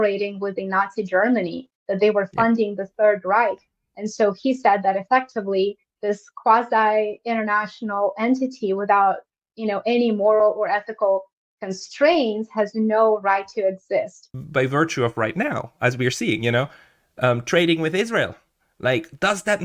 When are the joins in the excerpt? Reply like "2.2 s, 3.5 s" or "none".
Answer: 14.4 s